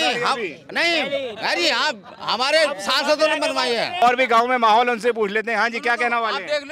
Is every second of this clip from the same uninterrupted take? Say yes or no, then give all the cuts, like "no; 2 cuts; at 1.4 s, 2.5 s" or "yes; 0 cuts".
no; 1 cut; at 4.0 s